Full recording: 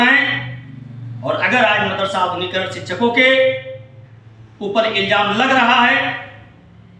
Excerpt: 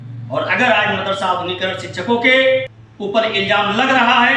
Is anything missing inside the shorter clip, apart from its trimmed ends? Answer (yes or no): yes